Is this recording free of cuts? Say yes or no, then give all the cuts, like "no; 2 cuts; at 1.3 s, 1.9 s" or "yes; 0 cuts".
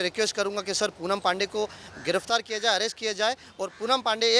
yes; 0 cuts